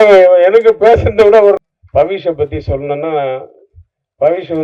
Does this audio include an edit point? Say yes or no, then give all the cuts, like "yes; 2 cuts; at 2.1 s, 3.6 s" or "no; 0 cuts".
yes; 1 cut; at 1.6 s